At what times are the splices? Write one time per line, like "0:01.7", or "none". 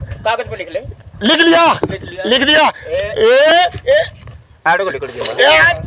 none